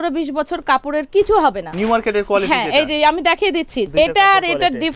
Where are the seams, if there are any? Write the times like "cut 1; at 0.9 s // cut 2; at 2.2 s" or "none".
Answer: cut 1; at 1.7 s // cut 2; at 3.8 s